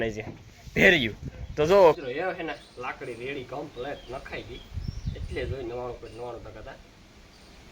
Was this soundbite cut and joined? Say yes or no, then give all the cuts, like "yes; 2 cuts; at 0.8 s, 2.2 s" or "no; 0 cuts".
yes; 1 cut; at 2.0 s